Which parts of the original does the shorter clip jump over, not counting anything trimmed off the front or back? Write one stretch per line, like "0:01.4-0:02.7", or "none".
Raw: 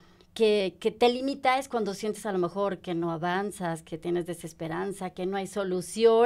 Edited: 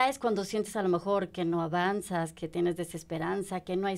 none